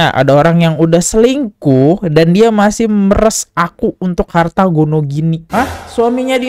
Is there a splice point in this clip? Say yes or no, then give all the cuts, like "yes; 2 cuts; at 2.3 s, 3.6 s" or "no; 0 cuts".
no; 0 cuts